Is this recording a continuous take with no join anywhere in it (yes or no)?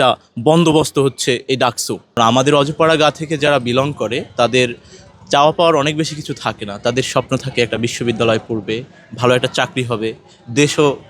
no